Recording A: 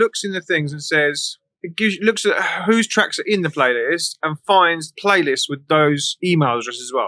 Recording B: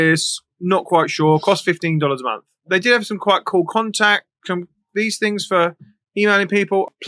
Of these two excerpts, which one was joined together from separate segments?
A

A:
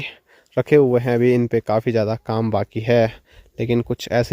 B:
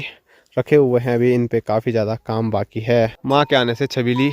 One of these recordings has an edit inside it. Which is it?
B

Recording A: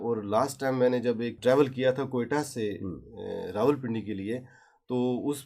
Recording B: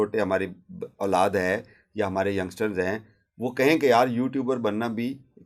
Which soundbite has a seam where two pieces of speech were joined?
A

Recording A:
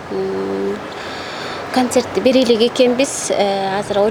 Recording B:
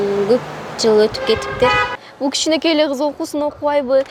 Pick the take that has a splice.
B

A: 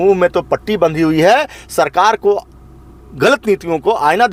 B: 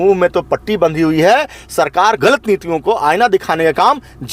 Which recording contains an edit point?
B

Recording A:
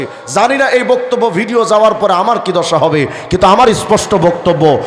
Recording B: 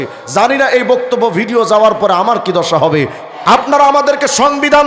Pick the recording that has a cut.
B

